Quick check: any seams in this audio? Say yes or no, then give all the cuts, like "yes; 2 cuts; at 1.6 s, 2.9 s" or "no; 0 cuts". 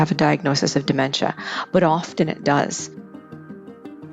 yes; 1 cut; at 3.0 s